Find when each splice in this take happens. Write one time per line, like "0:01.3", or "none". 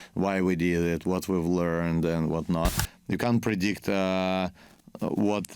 0:02.8